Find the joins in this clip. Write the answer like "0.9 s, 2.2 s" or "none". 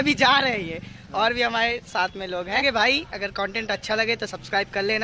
2.6 s